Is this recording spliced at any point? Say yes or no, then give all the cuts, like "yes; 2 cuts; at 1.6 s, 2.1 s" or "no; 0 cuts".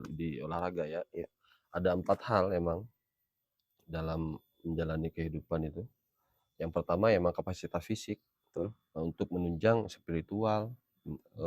no; 0 cuts